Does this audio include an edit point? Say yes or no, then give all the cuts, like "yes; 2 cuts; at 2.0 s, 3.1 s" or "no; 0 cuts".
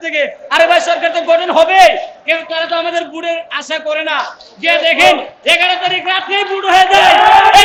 no; 0 cuts